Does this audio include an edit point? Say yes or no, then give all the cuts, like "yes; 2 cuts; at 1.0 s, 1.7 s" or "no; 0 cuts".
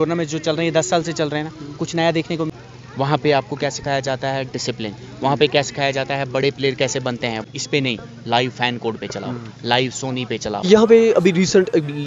yes; 3 cuts; at 2.5 s, 7.4 s, 10.6 s